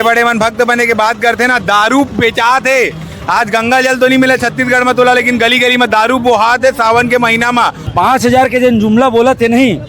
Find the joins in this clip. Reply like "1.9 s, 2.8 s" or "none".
7.8 s